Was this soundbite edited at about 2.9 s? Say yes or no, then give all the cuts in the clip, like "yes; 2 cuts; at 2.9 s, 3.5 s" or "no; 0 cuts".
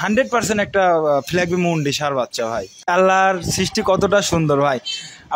yes; 1 cut; at 2.9 s